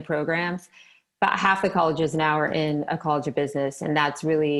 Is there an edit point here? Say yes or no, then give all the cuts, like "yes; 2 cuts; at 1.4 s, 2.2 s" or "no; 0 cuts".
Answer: no; 0 cuts